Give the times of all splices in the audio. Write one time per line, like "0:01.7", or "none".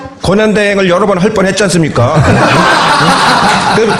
0:03.0